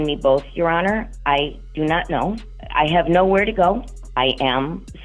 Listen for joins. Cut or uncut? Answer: cut